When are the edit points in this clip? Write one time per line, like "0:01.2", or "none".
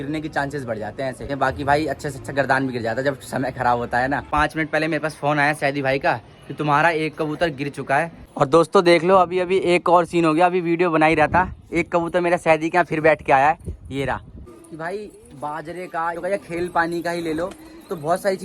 0:01.3
0:04.2
0:08.2
0:14.6